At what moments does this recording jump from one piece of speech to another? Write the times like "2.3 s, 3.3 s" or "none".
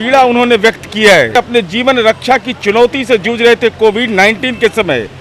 1.4 s